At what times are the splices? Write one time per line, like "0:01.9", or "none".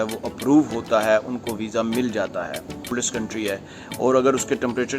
0:02.9